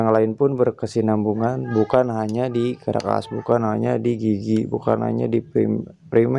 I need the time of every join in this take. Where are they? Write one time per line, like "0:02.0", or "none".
none